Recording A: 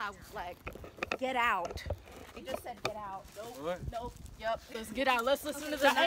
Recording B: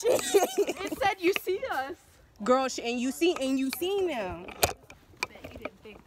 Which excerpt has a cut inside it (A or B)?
B